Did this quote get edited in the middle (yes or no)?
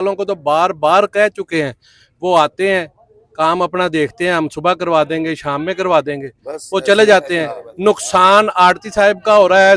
no